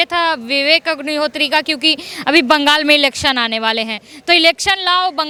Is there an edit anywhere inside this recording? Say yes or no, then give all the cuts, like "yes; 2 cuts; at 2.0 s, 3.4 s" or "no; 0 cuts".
no; 0 cuts